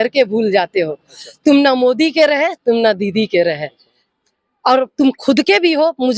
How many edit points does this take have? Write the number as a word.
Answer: zero